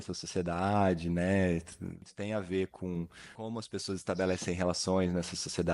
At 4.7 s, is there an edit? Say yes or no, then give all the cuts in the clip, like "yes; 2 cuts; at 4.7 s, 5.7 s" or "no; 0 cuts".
no; 2 cuts; at 2.0 s, 3.2 s